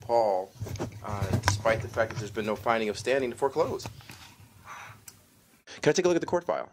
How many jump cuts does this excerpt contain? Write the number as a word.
one